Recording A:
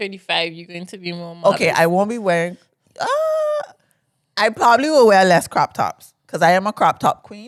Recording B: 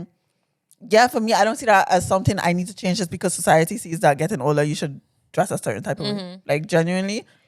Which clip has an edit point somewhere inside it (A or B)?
B